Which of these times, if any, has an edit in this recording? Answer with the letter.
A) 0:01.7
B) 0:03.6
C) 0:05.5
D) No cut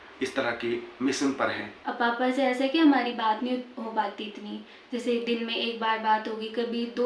A